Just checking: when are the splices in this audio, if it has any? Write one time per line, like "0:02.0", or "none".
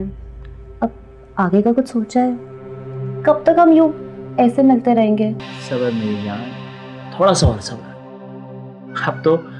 0:05.5